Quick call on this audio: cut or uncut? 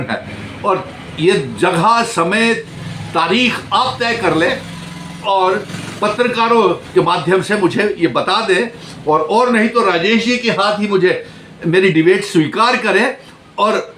uncut